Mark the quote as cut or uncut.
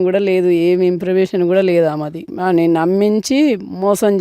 cut